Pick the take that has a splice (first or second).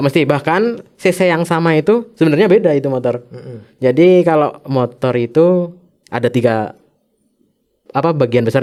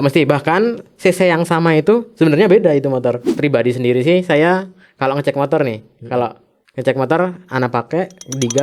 second